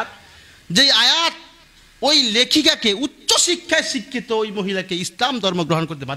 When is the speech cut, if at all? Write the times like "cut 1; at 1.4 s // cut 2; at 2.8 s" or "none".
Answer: none